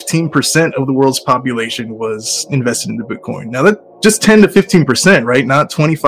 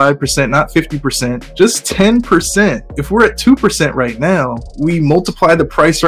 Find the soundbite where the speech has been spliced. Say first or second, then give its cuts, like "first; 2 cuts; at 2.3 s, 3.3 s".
second; 3 cuts; at 1.4 s, 2.9 s, 4.6 s